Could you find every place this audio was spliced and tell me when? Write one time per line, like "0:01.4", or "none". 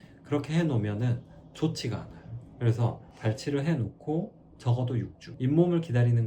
0:03.1